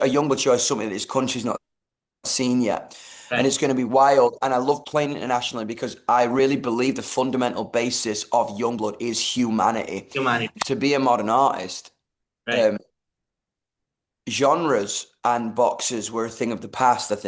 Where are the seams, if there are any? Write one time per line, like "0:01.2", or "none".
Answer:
0:10.5